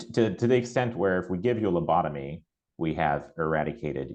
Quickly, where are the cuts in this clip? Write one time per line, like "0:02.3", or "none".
none